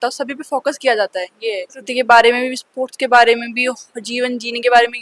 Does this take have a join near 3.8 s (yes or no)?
no